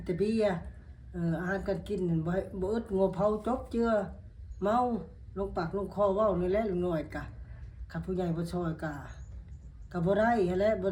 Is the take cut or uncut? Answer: uncut